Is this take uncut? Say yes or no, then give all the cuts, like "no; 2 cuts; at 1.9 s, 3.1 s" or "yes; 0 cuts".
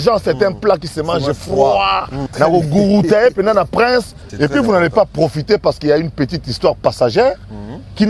no; 2 cuts; at 2.2 s, 4.2 s